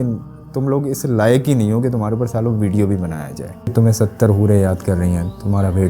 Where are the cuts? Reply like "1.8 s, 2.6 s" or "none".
3.7 s